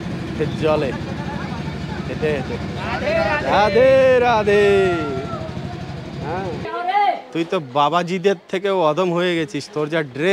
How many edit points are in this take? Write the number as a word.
one